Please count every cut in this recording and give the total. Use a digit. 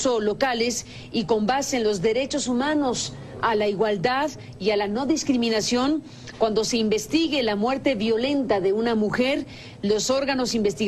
1